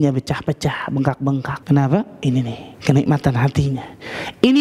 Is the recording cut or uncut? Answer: cut